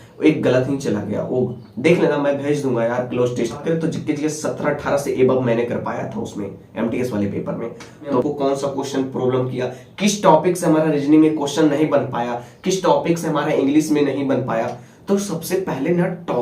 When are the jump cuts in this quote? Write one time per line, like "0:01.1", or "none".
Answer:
0:03.6
0:08.2